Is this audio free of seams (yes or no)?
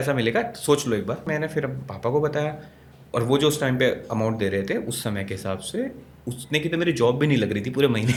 yes